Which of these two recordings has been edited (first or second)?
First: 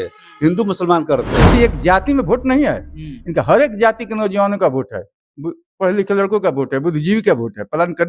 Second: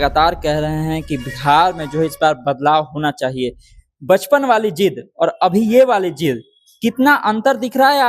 first